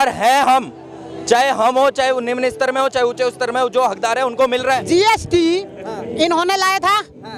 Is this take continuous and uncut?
no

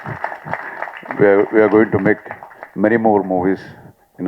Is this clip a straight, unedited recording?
yes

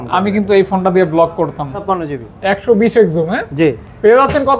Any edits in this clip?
yes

